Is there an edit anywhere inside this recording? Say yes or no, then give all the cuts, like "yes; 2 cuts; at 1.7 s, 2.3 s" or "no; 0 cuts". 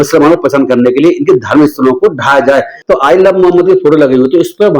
yes; 1 cut; at 2.7 s